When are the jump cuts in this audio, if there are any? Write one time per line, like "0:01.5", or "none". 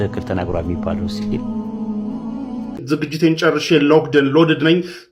0:02.8